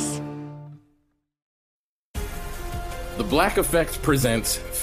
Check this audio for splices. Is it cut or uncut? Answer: cut